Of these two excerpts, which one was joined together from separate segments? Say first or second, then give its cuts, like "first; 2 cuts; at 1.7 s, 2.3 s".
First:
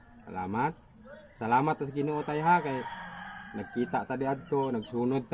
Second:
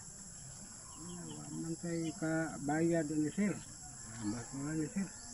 second; 1 cut; at 3.6 s